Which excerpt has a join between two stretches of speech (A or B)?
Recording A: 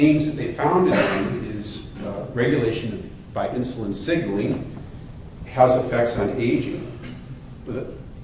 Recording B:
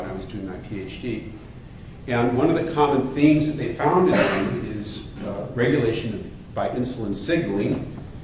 B